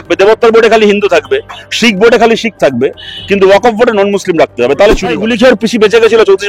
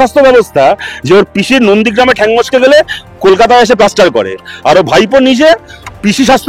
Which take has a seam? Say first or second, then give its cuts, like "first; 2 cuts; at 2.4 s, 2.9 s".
first; 1 cut; at 5.2 s